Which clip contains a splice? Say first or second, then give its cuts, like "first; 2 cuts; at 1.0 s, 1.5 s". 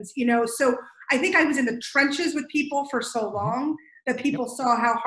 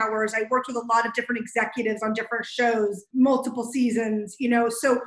second; 1 cut; at 3.0 s